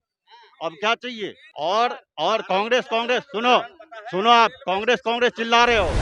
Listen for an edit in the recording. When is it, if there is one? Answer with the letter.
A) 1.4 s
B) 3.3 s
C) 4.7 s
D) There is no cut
A